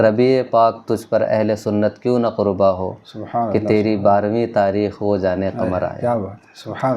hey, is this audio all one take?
yes; 0 cuts

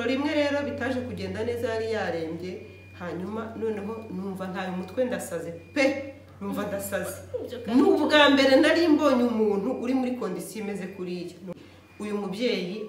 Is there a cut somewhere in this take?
yes; 1 cut; at 11.5 s

